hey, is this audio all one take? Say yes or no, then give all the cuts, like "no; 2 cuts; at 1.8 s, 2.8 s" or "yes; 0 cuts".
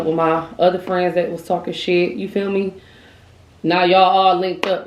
yes; 0 cuts